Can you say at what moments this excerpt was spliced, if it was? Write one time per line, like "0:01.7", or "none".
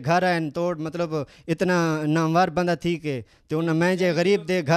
none